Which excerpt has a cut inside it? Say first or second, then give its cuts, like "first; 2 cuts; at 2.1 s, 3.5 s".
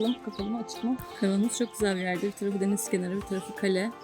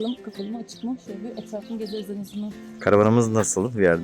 first; 1 cut; at 1.1 s